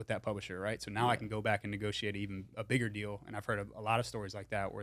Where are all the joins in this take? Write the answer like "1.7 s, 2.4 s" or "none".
none